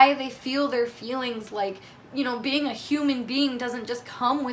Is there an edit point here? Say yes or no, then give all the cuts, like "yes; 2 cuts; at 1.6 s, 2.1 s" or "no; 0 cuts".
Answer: no; 0 cuts